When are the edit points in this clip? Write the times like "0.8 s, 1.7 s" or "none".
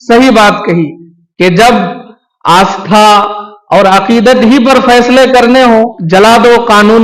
6.0 s